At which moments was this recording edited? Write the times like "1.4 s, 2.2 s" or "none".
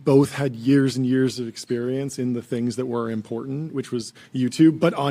none